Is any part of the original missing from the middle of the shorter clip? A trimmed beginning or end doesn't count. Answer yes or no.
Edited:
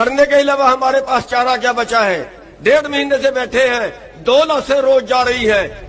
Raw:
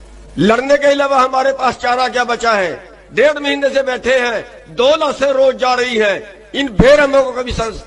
no